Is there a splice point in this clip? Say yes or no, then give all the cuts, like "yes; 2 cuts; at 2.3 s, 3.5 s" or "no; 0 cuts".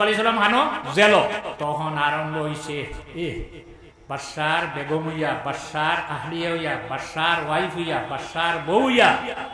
yes; 1 cut; at 1.5 s